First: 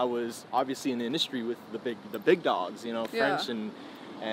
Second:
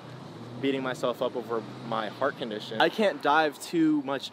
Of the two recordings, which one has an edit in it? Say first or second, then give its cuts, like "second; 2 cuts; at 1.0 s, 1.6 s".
second; 1 cut; at 2.8 s